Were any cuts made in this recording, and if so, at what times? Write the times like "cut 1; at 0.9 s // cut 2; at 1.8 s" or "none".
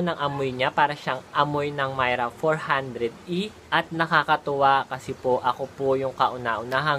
cut 1; at 3.6 s

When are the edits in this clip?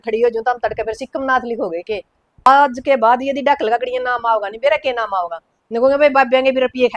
cut 1; at 2.5 s

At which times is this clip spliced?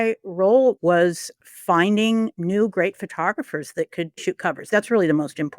cut 1; at 0.8 s // cut 2; at 2.4 s // cut 3; at 4.2 s

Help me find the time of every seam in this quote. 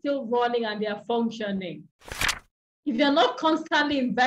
cut 1; at 2.3 s

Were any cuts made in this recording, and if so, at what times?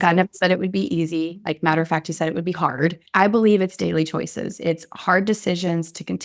cut 1; at 3.0 s

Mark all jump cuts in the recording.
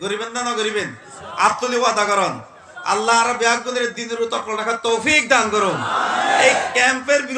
none

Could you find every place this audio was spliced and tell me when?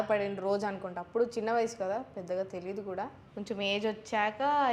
cut 1; at 3.2 s

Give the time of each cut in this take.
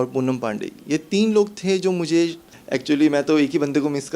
cut 1; at 2.5 s

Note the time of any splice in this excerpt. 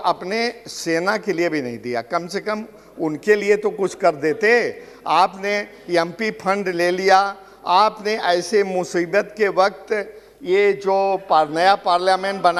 none

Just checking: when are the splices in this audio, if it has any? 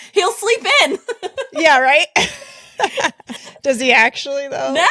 cut 1; at 3.3 s

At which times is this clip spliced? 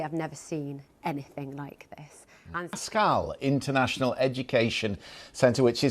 cut 1; at 2.8 s

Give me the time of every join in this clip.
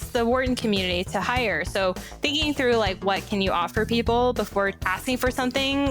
cut 1; at 4.9 s

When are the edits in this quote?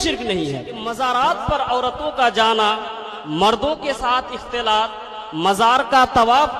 cut 1; at 0.9 s

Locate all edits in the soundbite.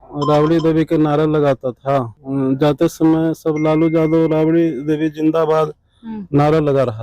cut 1; at 2.2 s

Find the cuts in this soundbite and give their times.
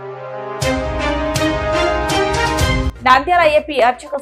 cut 1; at 1.7 s // cut 2; at 2.9 s

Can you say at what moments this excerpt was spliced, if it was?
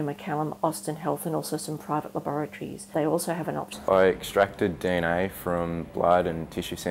none

